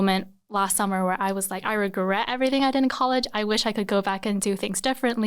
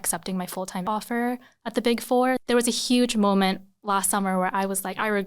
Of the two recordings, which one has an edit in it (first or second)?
second